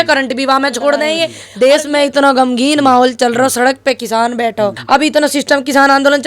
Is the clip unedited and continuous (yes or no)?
no